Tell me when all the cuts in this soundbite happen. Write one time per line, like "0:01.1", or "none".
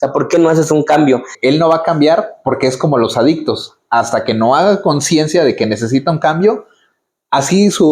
0:01.3

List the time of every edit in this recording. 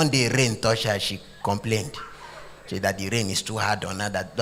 none

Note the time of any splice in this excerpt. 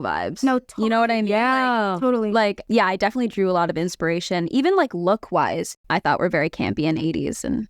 0:02.6
0:05.7

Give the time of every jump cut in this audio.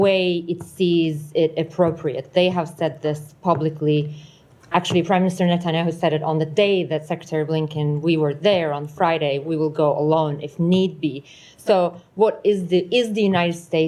none

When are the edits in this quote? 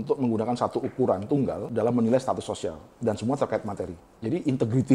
0:01.7
0:02.9
0:04.0

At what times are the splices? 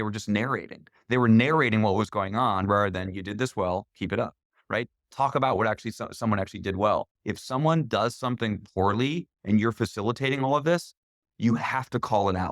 0:07.2

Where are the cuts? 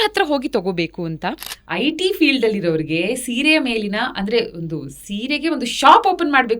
0:01.5

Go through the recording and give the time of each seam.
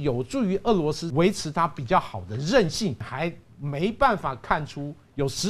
0:01.0
0:03.0

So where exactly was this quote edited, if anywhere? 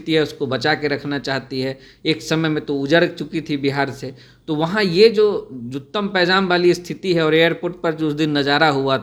none

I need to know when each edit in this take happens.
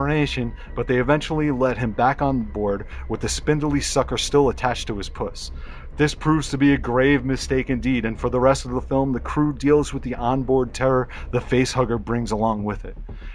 0:01.7

